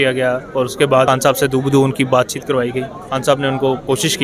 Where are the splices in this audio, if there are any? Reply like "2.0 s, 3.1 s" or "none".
1.1 s